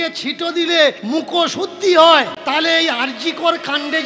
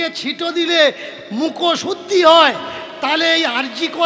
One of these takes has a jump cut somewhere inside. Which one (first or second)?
first